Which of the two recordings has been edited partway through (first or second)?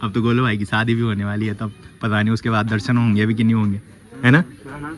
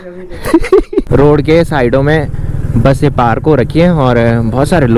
second